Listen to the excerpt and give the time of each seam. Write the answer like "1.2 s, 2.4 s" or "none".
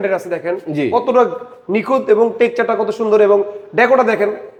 none